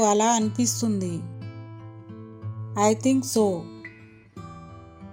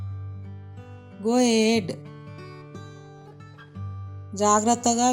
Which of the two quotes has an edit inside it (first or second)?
second